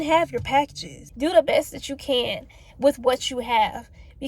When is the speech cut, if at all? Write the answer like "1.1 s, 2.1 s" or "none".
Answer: 1.0 s